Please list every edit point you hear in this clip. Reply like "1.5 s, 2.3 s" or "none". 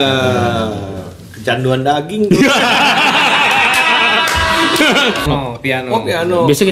5.2 s

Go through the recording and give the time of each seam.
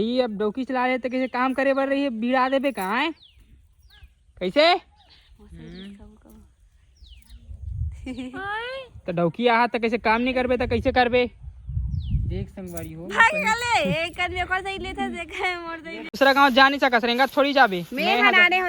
16.1 s

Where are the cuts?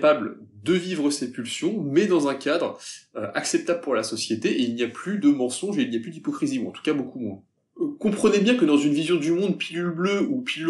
none

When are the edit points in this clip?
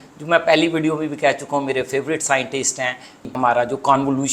3.3 s

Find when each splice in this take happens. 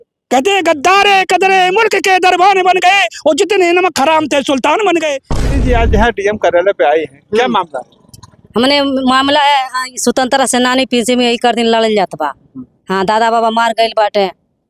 5.4 s

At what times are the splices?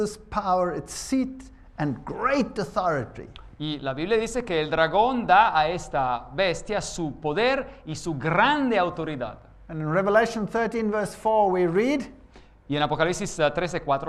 none

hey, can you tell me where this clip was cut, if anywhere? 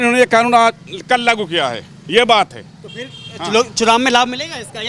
none

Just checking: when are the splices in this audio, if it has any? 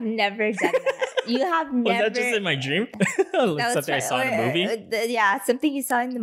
2.9 s

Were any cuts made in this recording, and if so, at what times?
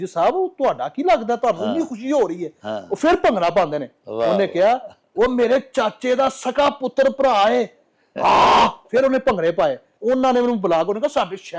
9.9 s

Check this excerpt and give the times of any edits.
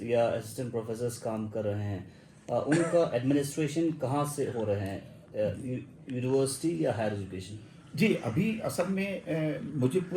none

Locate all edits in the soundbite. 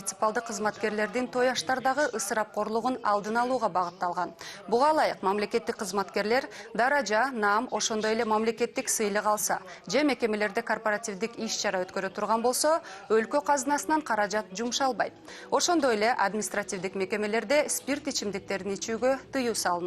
2.5 s

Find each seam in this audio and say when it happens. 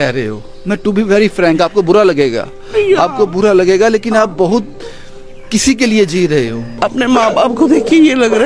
6.8 s

